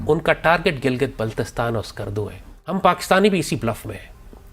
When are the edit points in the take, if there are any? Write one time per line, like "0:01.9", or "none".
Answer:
0:02.7